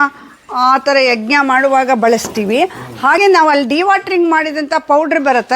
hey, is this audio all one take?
no; 1 cut; at 3.2 s

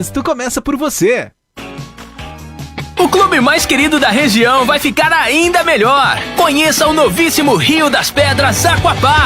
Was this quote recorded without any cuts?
no; 1 cut; at 1.4 s

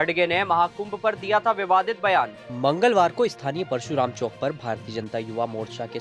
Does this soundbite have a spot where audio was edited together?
no; 0 cuts

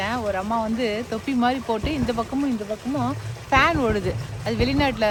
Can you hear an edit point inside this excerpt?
no; 0 cuts

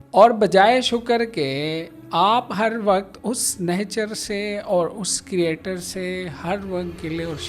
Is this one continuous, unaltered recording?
yes; 0 cuts

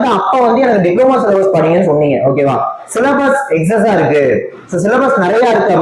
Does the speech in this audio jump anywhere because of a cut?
no; 0 cuts

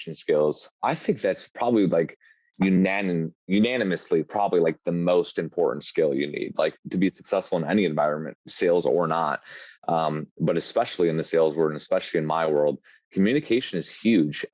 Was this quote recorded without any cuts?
yes; 0 cuts

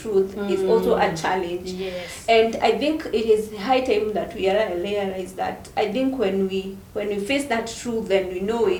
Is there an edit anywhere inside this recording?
no; 0 cuts

